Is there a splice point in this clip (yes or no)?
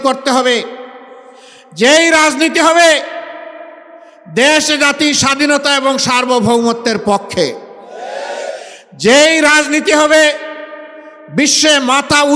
no